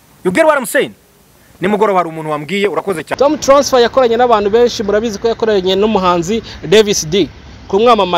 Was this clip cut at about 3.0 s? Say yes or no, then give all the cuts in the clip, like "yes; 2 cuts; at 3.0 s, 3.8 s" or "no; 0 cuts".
yes; 1 cut; at 3.0 s